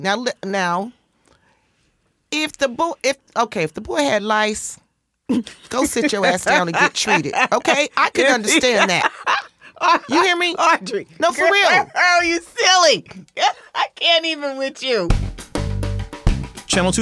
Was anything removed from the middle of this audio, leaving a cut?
yes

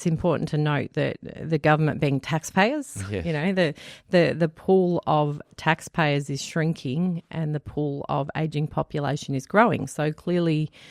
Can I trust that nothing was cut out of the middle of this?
yes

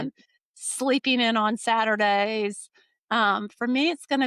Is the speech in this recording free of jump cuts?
yes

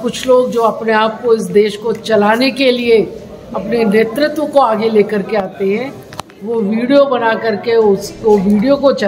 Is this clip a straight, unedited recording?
yes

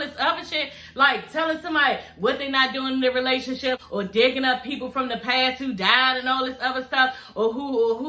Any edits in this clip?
no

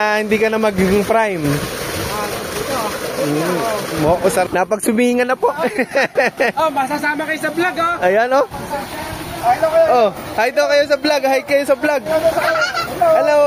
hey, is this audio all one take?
no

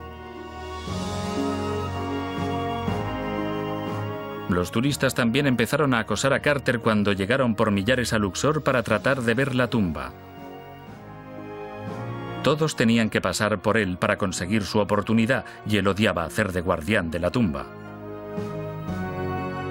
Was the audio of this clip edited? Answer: no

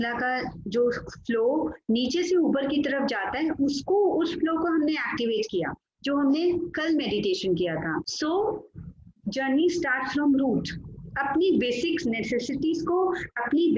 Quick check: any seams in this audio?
yes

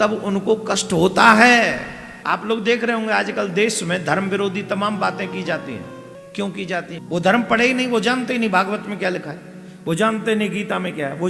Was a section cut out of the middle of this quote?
yes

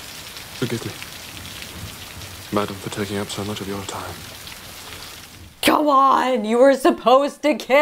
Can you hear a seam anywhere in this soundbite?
yes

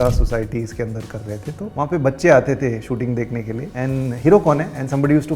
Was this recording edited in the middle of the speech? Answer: yes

